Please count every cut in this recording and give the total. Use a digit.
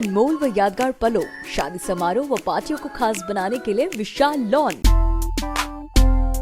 1